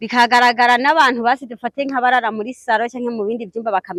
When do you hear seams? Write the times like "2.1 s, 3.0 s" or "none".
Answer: none